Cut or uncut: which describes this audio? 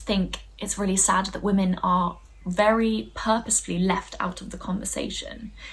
uncut